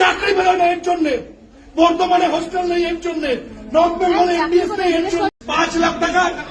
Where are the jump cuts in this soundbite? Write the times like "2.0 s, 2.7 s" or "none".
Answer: 5.3 s